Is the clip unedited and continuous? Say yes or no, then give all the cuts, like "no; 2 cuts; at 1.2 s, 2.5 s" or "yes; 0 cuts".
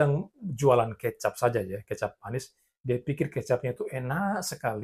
yes; 0 cuts